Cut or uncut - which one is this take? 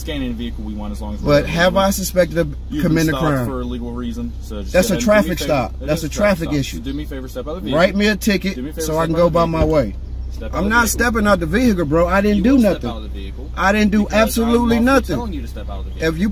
cut